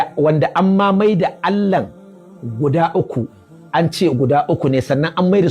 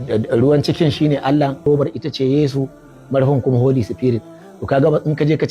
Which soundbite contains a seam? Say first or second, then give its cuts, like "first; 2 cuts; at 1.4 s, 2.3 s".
second; 1 cut; at 1.6 s